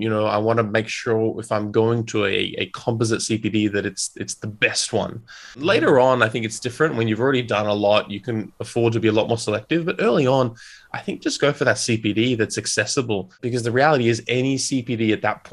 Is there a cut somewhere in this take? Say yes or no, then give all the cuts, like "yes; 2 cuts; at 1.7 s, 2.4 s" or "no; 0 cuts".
yes; 2 cuts; at 5.6 s, 13.4 s